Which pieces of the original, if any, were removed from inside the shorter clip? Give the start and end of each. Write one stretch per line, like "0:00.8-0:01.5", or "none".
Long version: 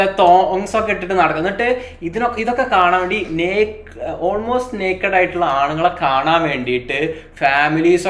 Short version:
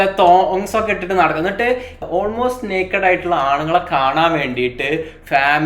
0:01.9-0:04.0